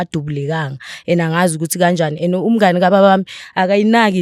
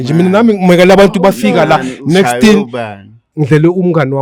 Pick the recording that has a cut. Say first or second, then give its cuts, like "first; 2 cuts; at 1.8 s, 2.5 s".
second; 1 cut; at 3.2 s